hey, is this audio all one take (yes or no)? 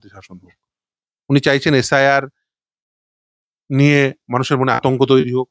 yes